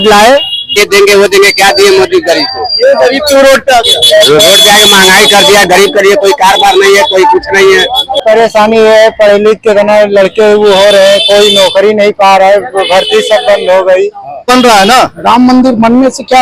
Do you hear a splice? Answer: yes; 3 cuts; at 0.8 s, 8.2 s, 14.5 s

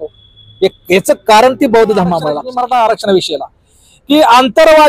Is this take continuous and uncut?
no; 1 cut; at 2.4 s

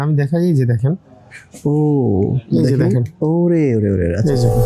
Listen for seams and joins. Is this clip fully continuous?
yes; 0 cuts

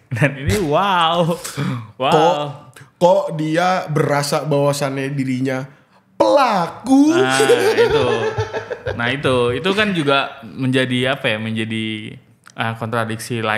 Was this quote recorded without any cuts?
yes; 0 cuts

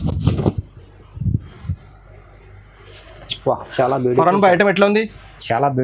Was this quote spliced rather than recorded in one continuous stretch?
no; 0 cuts

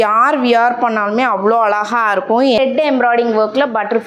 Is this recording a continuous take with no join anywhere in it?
no; 1 cut; at 2.6 s

